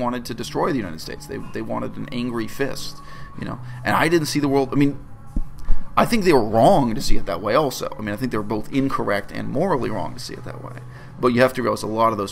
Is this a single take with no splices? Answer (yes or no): yes